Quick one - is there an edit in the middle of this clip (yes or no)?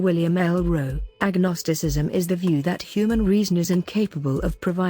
yes